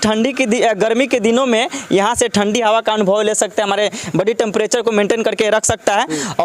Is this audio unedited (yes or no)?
yes